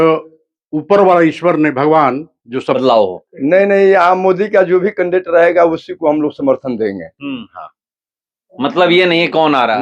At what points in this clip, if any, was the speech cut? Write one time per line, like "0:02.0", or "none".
0:02.8